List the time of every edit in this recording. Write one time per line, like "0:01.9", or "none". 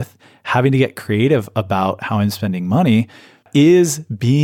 0:03.5